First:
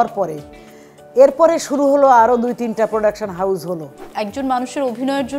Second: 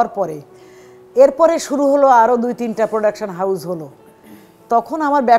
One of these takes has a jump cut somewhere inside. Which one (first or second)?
first